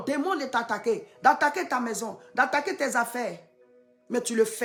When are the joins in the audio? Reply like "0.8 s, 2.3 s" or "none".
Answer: none